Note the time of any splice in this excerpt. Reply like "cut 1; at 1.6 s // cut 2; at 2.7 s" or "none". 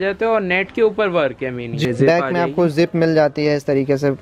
cut 1; at 1.8 s